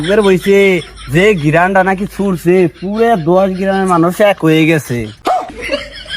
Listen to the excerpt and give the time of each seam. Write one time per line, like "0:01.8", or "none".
0:05.1